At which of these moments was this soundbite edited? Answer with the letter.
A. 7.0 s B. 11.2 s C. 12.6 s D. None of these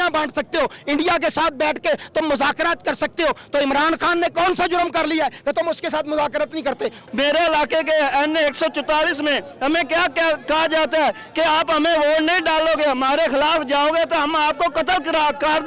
A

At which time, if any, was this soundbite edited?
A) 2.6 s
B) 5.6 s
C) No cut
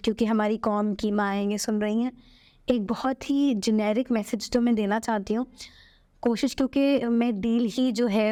C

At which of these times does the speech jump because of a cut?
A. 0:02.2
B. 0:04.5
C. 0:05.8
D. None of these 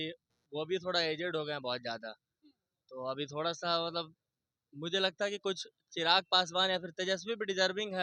D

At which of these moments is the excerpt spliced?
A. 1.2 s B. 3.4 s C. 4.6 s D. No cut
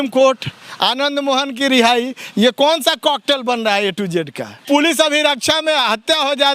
C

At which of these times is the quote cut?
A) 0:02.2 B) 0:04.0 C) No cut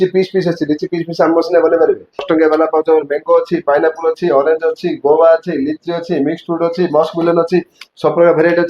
A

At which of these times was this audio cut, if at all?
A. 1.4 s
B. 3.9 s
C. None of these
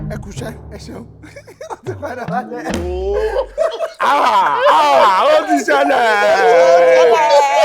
B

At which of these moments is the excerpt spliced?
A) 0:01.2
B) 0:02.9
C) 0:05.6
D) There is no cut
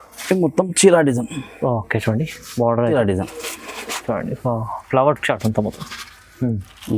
B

